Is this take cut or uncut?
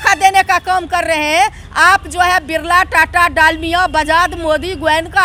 uncut